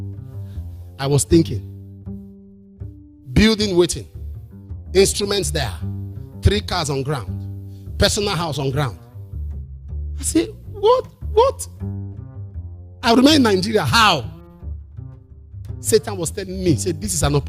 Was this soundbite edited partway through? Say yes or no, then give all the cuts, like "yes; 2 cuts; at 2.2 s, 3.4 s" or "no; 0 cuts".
yes; 4 cuts; at 1.6 s, 3.0 s, 14.3 s, 15.9 s